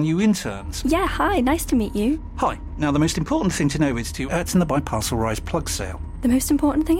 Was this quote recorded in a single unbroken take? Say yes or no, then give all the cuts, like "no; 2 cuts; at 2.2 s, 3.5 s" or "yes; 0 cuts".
yes; 0 cuts